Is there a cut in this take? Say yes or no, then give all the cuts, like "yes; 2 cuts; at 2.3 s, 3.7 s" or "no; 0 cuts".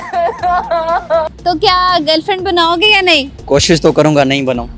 yes; 1 cut; at 1.3 s